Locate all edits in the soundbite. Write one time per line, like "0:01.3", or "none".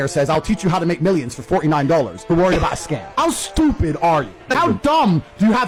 none